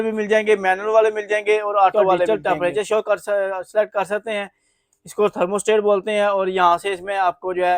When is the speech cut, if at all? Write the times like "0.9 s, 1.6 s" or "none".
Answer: 1.9 s

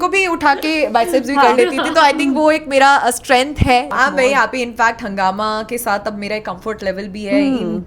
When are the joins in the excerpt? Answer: 3.9 s

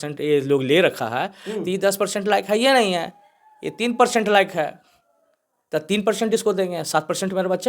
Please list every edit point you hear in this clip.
none

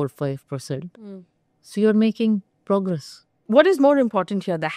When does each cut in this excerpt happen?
3.4 s

